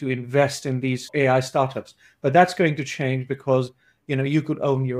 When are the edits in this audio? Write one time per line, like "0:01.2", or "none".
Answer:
0:01.0